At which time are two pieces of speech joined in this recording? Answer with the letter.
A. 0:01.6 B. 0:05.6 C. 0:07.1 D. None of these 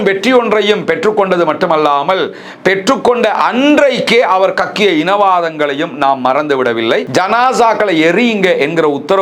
C